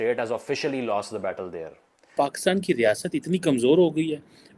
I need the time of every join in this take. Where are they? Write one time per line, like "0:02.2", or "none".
0:02.1

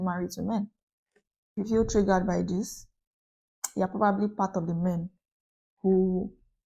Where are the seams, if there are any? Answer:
0:01.6

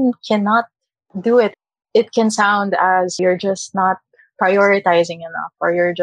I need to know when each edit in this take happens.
0:01.5
0:03.2

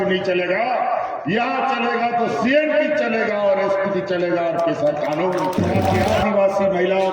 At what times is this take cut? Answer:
0:06.0

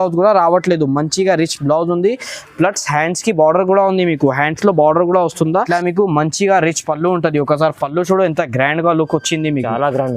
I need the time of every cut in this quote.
0:05.7

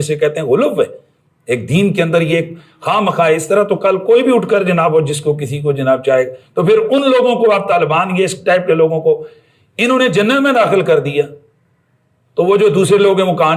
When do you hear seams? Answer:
none

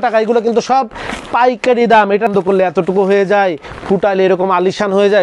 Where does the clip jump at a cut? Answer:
0:02.3

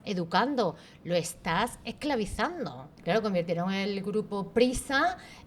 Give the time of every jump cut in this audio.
0:02.9

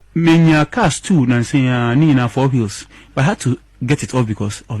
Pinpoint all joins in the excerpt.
none

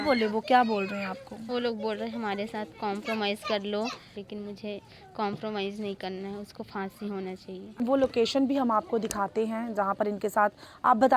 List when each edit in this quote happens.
0:04.1
0:07.8

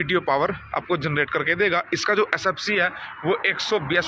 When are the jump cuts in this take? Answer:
none

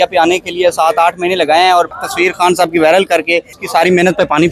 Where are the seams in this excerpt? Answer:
0:02.0
0:03.6

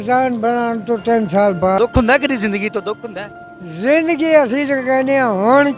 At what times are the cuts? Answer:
0:01.8

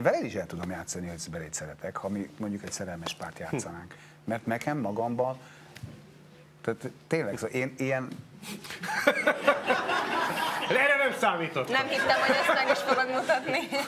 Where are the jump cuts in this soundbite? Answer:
none

